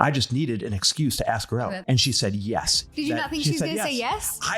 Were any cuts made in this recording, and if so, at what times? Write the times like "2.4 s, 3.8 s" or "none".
1.8 s, 2.9 s